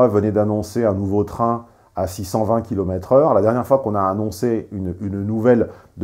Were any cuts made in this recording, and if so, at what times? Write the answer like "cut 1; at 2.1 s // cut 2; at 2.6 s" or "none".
none

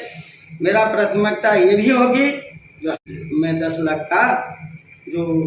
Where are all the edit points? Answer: cut 1; at 3.0 s

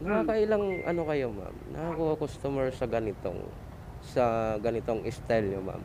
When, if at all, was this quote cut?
none

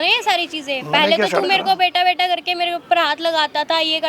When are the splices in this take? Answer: none

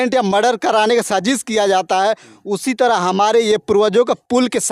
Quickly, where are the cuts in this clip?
none

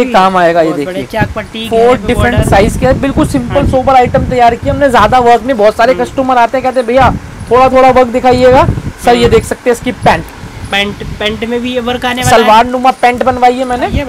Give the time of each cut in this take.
none

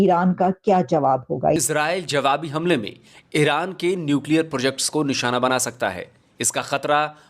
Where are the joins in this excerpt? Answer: cut 1; at 1.5 s

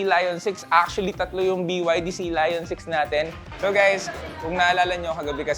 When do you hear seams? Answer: cut 1; at 3.4 s

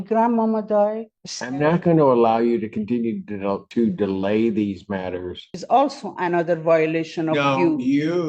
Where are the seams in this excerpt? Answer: cut 1; at 1.1 s // cut 2; at 5.5 s

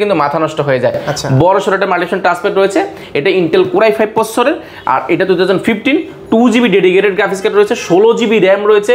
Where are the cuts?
none

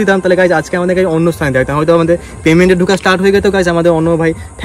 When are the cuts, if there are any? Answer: none

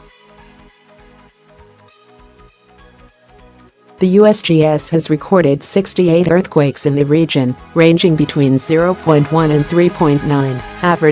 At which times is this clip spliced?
cut 1; at 4.0 s

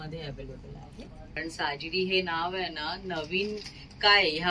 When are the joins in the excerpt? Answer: cut 1; at 1.3 s

